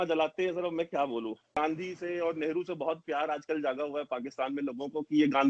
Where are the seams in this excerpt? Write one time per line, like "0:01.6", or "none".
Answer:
0:01.6